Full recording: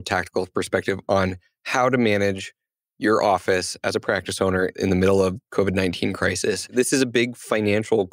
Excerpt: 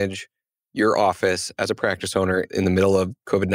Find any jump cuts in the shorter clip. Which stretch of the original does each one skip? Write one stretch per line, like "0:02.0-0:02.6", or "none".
none